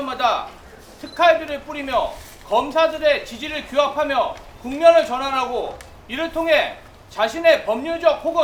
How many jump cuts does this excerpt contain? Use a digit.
0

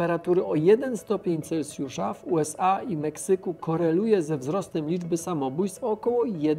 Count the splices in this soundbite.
0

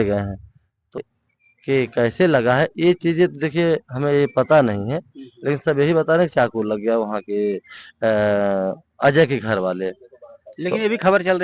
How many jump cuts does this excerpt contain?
1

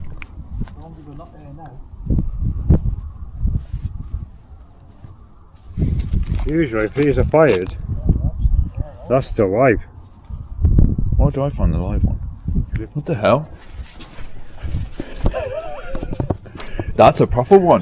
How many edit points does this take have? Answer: 1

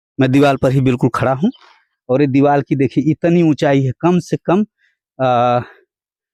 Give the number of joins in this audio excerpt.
0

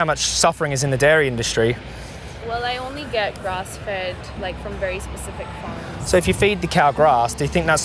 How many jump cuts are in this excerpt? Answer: 0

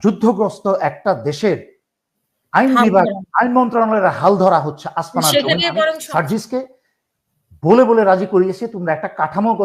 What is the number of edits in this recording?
1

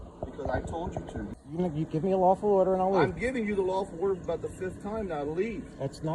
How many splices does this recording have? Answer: 1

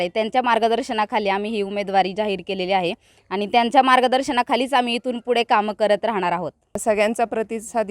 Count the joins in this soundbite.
1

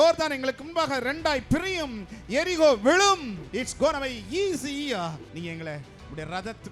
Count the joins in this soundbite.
2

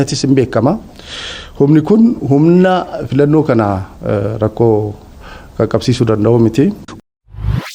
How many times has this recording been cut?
1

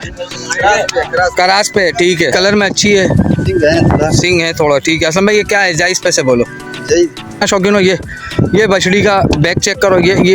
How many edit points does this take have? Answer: 2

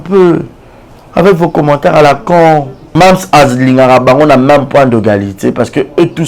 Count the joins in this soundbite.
1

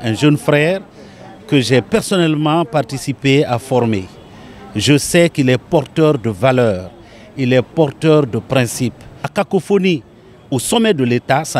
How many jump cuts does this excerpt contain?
1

